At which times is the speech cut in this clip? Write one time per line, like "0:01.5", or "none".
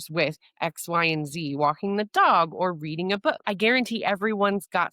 0:03.4